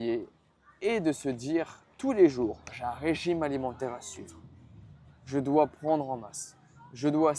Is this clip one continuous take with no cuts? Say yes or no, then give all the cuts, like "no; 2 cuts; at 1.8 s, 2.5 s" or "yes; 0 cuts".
yes; 0 cuts